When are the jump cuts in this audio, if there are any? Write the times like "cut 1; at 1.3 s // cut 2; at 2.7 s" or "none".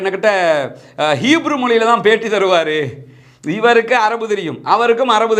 none